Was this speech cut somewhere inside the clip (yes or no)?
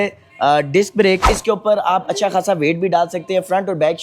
yes